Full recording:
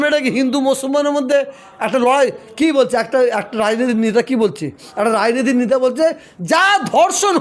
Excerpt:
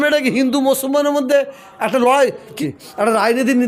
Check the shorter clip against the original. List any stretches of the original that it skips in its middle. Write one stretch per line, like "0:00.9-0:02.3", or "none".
0:02.6-0:04.5